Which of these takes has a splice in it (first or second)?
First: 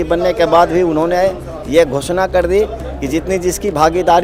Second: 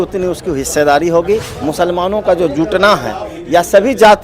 second